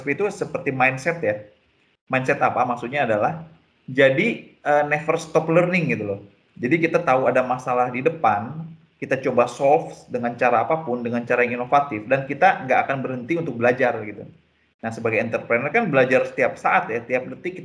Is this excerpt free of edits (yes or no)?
yes